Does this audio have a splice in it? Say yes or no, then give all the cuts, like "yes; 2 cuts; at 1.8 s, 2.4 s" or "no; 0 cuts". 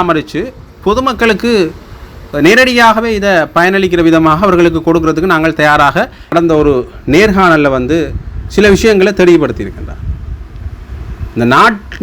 yes; 1 cut; at 6.3 s